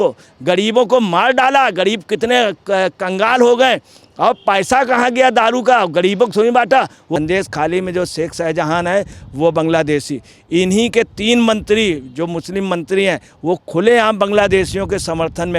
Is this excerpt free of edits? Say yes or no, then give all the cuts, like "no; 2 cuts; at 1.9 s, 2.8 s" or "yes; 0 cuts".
no; 1 cut; at 7.2 s